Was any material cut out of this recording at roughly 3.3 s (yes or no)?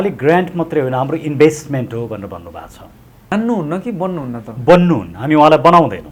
yes